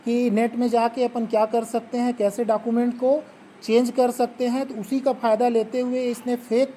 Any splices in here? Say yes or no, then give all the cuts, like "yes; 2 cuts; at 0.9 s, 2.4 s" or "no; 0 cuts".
no; 0 cuts